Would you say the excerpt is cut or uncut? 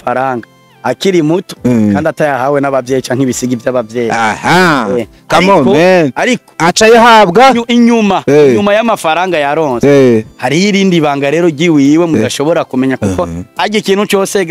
uncut